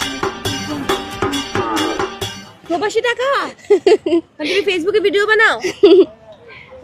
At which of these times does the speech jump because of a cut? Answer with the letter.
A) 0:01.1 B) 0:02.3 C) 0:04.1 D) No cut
D